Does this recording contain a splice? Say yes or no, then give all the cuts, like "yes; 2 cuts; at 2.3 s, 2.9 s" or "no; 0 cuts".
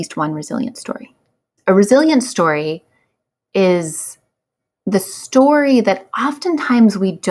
yes; 1 cut; at 1.5 s